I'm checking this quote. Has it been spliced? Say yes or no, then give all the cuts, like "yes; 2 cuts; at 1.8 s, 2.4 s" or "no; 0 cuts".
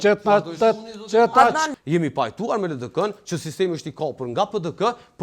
yes; 1 cut; at 1.7 s